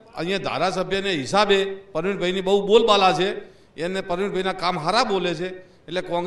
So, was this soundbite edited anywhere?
no; 0 cuts

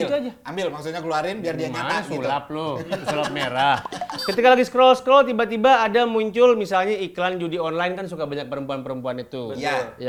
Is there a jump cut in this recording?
no; 0 cuts

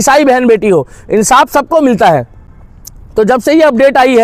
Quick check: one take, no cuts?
yes; 0 cuts

